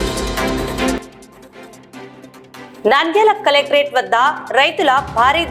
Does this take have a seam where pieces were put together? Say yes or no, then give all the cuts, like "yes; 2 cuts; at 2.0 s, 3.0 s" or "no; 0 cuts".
no; 0 cuts